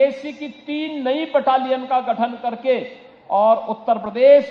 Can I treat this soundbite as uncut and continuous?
yes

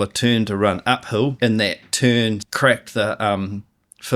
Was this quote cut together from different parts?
yes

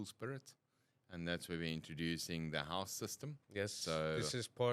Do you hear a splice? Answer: no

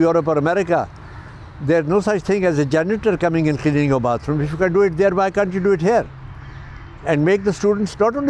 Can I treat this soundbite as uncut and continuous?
yes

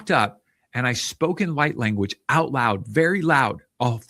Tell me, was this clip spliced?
no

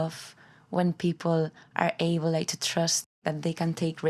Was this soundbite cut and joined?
yes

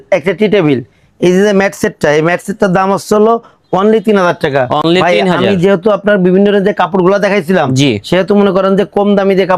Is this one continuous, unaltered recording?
yes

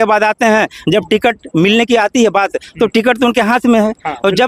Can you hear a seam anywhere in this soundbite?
no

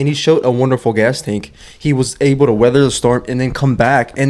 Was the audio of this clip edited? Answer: no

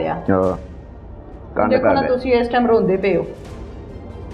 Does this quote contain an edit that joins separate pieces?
no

